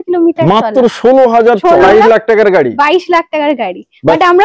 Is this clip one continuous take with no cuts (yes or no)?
no